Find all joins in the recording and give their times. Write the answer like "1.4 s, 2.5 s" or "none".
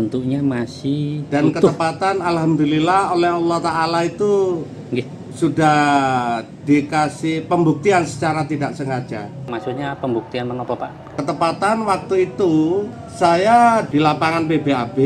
9.5 s, 11.1 s, 12.9 s, 13.9 s